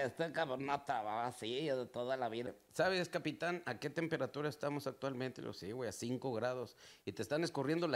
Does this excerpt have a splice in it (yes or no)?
yes